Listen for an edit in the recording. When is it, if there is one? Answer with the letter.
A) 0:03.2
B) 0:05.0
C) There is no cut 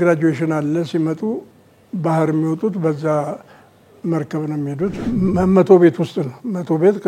B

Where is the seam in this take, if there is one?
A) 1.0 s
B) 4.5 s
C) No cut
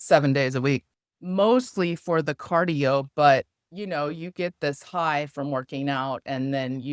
A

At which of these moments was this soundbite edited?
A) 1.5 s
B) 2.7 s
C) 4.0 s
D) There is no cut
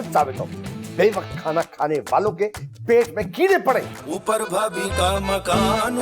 C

